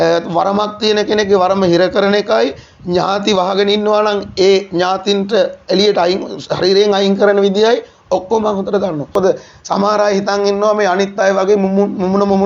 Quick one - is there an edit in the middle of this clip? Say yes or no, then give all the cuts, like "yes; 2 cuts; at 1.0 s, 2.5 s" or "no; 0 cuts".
yes; 1 cut; at 9.1 s